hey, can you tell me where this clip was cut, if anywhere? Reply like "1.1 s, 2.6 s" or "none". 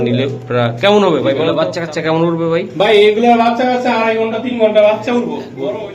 1.5 s